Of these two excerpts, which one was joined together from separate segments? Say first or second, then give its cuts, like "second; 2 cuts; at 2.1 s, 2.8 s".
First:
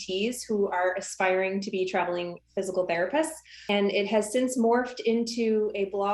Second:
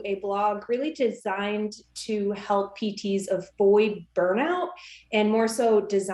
first; 1 cut; at 3.7 s